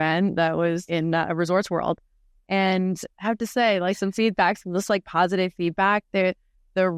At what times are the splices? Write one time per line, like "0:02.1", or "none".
none

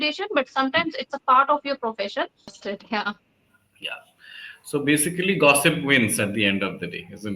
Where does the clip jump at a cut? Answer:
0:02.5

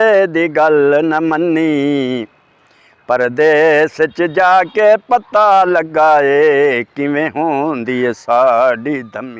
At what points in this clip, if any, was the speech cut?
none

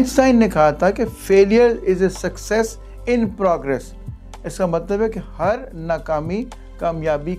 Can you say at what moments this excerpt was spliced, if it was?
none

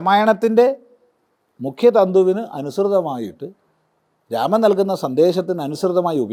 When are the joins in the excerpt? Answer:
none

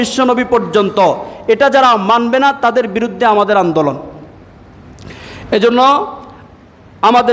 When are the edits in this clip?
none

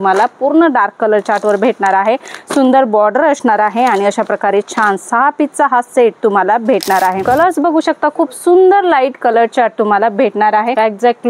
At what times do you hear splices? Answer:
0:07.2

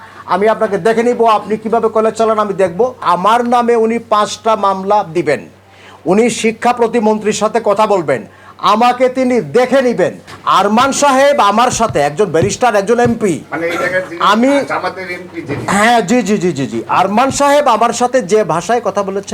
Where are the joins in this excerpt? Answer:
0:03.0
0:10.3

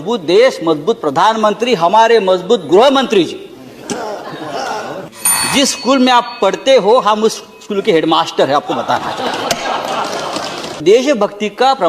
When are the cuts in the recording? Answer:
0:05.1
0:10.8

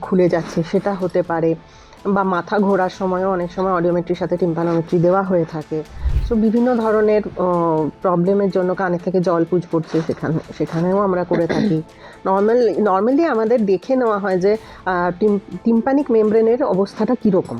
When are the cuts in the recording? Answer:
none

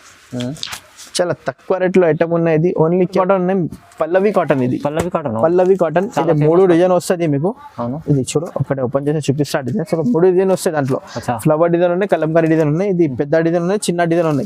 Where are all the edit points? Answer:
0:03.1

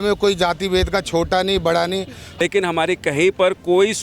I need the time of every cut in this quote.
0:02.2

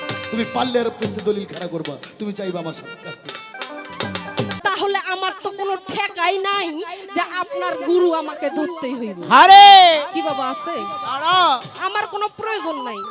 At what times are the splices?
0:04.5

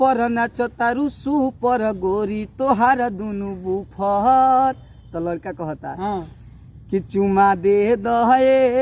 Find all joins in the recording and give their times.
none

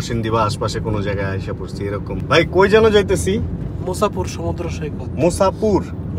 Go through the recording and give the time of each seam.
none

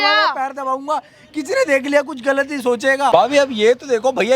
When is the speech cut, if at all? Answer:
0:03.1

